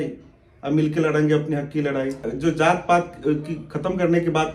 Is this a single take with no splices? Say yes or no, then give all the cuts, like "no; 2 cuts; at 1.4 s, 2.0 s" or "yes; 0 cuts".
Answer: no; 1 cut; at 2.2 s